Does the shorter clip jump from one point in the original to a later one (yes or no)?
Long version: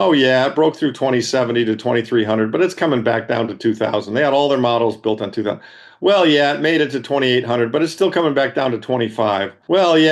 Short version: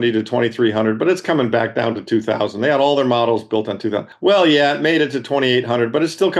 yes